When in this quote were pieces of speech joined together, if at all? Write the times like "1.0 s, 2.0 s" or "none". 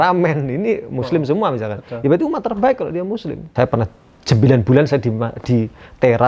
3.4 s